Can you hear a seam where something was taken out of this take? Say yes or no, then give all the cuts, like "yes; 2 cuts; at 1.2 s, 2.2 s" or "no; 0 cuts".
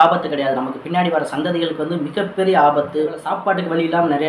yes; 1 cut; at 3.3 s